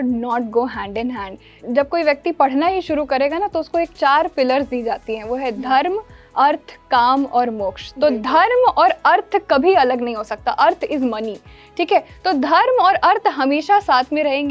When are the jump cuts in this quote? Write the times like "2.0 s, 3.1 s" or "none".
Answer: 1.6 s